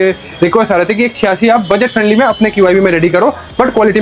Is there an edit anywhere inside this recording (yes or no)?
no